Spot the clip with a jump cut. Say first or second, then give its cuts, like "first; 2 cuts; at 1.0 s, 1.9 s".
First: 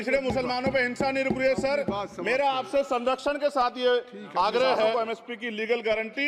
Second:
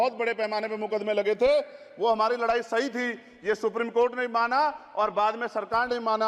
first; 1 cut; at 4.9 s